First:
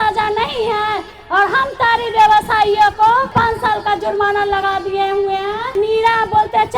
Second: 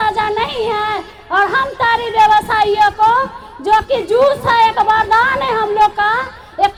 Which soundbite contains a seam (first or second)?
first